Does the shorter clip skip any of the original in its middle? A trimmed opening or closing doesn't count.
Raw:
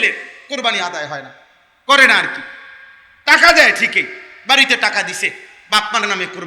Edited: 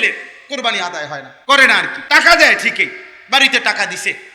yes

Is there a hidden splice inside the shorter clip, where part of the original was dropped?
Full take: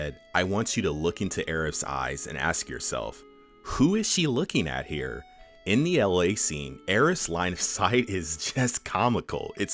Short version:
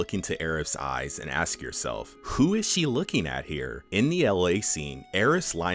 yes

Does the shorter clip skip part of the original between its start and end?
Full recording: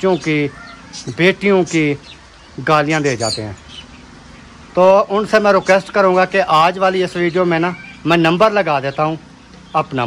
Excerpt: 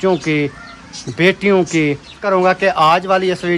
yes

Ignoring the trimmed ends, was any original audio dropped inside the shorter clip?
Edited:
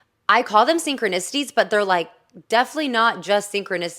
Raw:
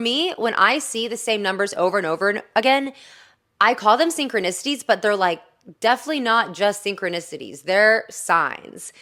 no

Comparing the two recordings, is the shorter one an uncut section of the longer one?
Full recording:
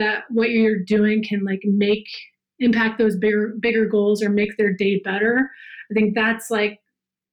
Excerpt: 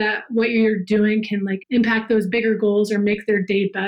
no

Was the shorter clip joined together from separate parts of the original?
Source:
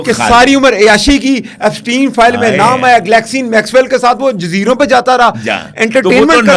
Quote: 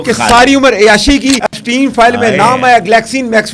yes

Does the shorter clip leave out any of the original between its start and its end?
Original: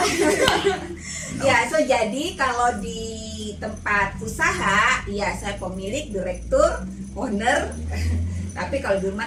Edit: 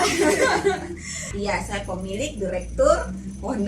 yes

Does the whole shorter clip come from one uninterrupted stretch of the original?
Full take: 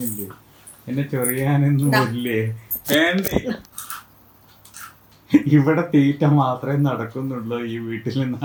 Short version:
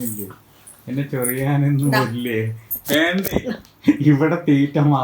no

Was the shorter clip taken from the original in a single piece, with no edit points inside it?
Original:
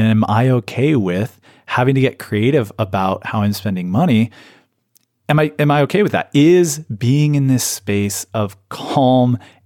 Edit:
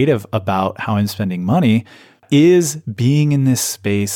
no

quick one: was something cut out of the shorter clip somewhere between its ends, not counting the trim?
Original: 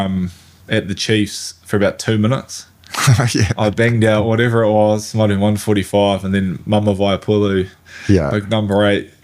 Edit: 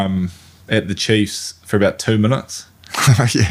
no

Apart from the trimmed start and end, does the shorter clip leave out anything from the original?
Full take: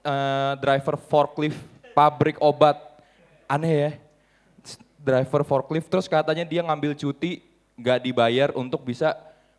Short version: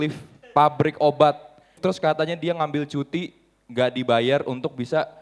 yes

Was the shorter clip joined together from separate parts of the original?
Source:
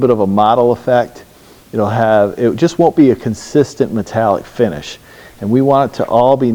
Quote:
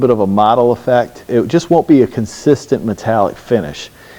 yes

